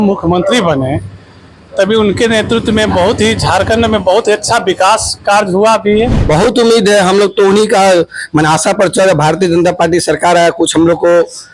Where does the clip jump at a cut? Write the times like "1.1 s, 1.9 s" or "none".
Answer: 6.2 s